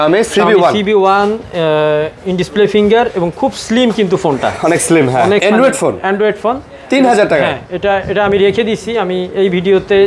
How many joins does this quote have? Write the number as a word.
one